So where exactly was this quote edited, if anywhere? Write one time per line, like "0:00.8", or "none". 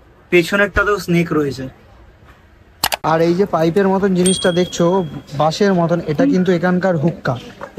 0:02.9